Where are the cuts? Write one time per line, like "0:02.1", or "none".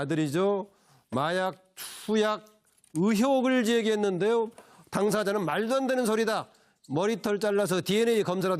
0:02.8